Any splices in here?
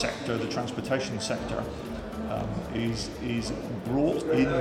no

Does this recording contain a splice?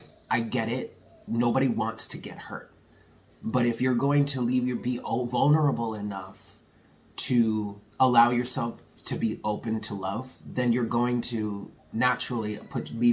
yes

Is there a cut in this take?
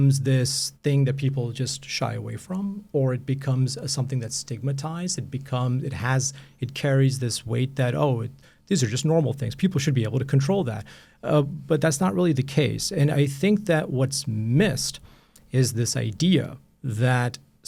no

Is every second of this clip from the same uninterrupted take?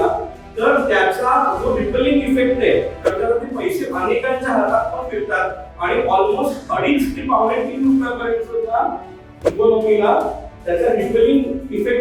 yes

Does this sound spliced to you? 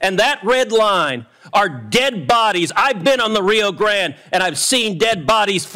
no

